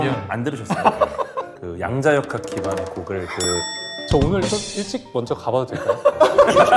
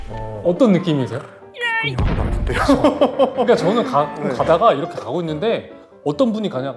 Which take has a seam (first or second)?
first